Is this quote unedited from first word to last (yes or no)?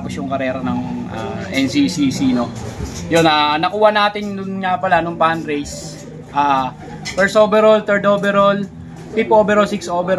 yes